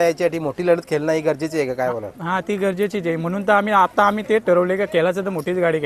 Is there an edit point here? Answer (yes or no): no